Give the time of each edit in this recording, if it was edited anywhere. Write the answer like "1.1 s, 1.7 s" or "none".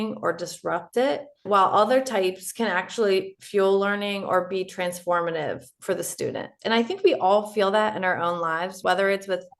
1.4 s, 6.5 s, 8.8 s